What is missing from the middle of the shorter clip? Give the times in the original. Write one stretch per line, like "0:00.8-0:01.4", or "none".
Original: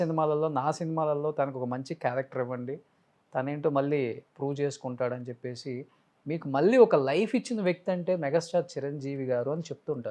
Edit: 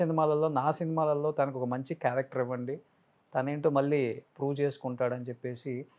none